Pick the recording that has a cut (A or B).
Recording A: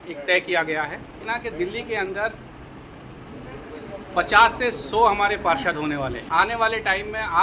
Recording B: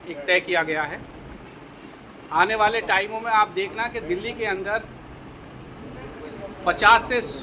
A